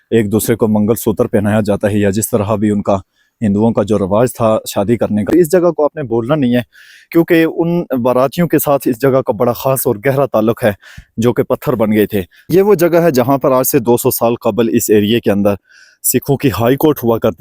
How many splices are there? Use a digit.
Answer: 2